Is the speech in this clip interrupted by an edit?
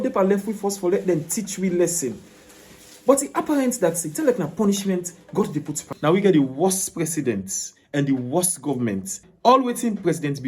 yes; 2 cuts; at 5.9 s, 9.3 s

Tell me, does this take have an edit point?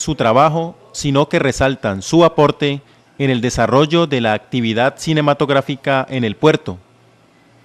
yes; 1 cut; at 5.9 s

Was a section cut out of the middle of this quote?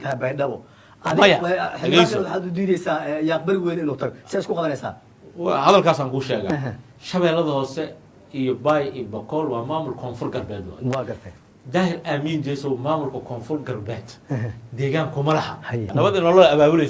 yes; 1 cut; at 15.9 s

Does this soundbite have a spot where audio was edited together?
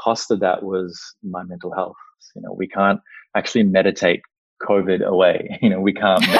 yes; 1 cut; at 2.2 s

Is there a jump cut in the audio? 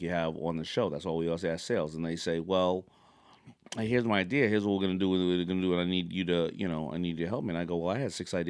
no; 0 cuts

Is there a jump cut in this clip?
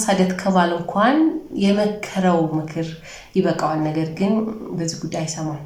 no; 0 cuts

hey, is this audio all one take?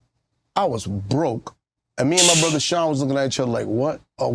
yes; 0 cuts

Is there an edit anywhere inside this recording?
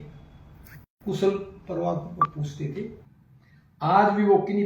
yes; 1 cut; at 3.0 s

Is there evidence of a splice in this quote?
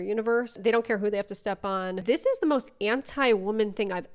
yes; 1 cut; at 2.0 s

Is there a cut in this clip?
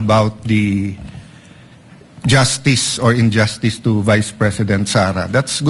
no; 0 cuts

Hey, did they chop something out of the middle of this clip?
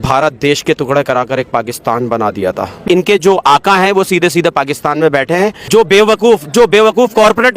yes; 2 cuts; at 2.8 s, 5.7 s

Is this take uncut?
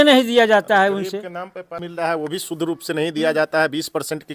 no; 1 cut; at 1.7 s

